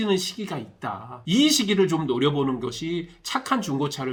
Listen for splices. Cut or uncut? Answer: uncut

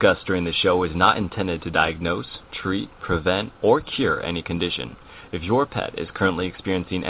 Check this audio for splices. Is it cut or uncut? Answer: uncut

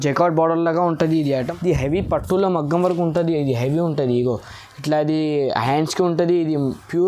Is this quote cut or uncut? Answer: cut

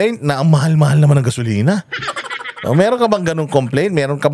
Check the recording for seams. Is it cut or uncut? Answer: uncut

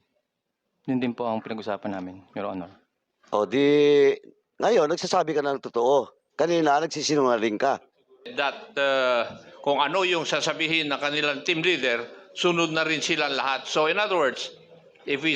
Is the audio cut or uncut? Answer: cut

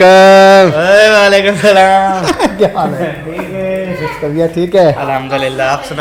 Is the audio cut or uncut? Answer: uncut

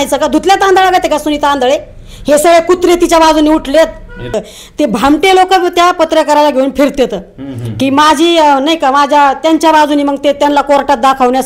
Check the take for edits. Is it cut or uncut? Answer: cut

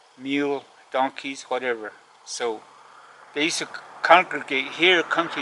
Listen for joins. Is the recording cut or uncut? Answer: uncut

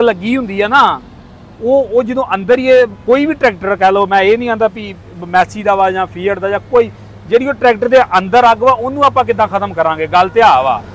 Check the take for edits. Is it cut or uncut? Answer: uncut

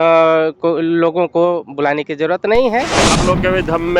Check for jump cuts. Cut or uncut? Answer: cut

